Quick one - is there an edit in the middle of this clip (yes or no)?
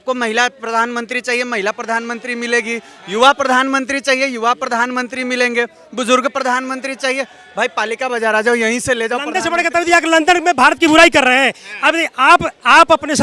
yes